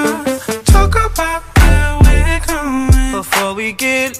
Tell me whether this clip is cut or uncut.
uncut